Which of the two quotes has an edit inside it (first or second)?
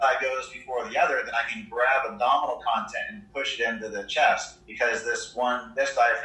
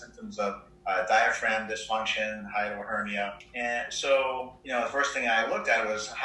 second